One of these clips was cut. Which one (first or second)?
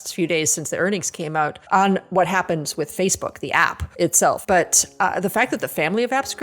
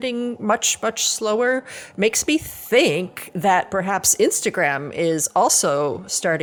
first